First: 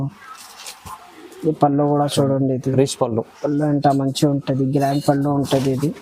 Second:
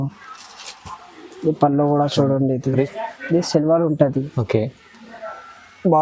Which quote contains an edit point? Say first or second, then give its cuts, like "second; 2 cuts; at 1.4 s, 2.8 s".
second; 1 cut; at 2.9 s